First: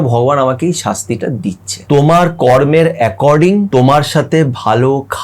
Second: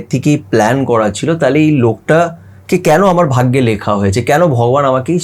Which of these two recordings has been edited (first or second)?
first